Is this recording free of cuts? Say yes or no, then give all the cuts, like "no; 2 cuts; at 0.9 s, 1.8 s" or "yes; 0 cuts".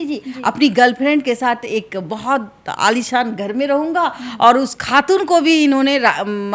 no; 1 cut; at 4.7 s